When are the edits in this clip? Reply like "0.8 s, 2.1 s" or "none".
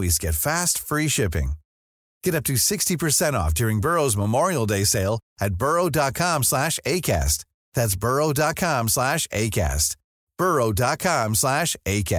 none